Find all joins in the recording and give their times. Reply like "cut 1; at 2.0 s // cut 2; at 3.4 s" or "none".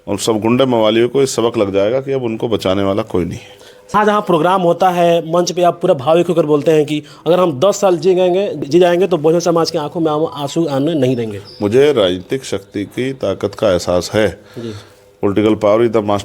cut 1; at 3.9 s // cut 2; at 8.6 s